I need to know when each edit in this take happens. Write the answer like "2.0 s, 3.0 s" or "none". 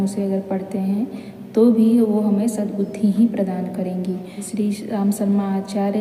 4.5 s